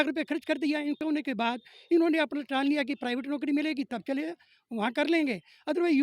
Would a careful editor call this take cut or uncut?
cut